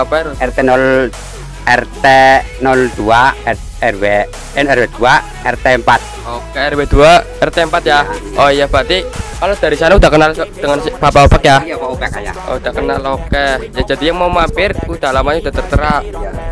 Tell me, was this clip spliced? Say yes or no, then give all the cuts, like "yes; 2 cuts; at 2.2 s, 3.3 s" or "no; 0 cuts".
no; 0 cuts